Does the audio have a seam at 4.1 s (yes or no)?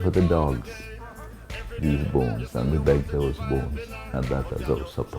yes